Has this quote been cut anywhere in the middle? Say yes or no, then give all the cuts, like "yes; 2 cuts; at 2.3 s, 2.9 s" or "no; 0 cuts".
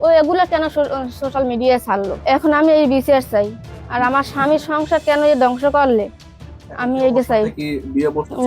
no; 0 cuts